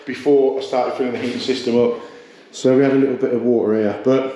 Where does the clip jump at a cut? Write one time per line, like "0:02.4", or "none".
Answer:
none